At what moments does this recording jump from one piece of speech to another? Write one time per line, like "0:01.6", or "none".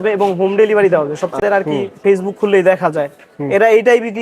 0:01.4